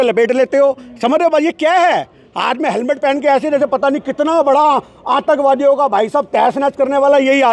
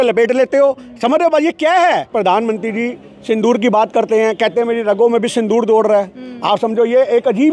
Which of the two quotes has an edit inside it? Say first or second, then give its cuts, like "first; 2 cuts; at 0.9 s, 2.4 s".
second; 1 cut; at 2.1 s